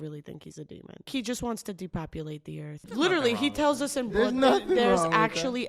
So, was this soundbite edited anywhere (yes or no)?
yes